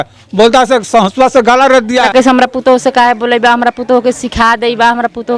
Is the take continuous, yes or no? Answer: no